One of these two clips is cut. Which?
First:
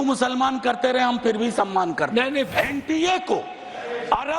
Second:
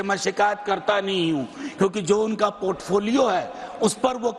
first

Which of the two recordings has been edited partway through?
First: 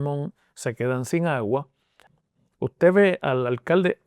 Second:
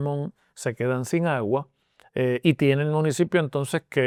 first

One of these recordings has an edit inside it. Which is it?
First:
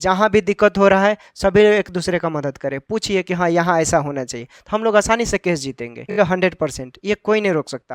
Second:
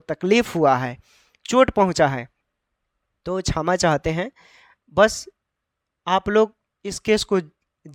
first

